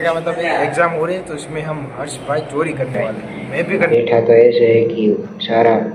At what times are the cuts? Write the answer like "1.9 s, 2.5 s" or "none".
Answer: 3.9 s